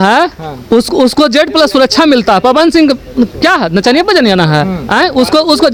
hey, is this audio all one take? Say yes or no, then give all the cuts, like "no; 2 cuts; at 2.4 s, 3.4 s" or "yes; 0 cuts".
yes; 0 cuts